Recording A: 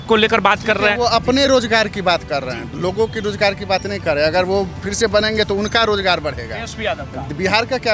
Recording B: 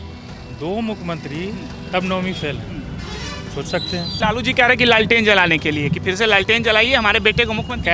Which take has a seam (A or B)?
B